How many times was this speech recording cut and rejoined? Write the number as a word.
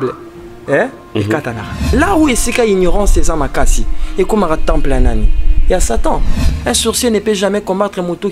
two